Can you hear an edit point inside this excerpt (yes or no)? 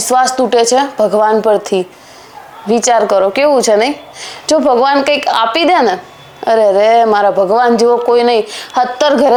no